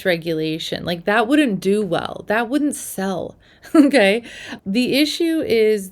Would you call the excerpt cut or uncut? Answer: uncut